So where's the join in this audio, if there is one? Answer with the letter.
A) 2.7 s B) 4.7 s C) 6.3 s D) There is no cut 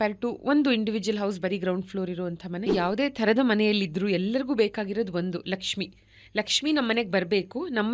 A